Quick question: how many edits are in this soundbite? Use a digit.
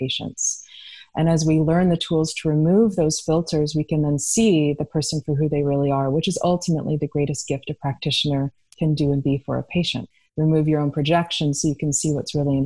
2